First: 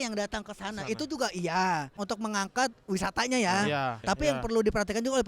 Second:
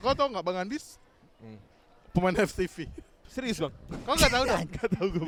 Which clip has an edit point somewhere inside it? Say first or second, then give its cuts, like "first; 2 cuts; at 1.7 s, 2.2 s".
first; 2 cuts; at 1.9 s, 4.0 s